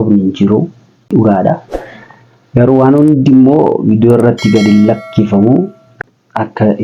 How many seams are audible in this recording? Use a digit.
2